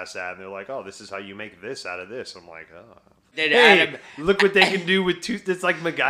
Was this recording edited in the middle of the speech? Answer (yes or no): yes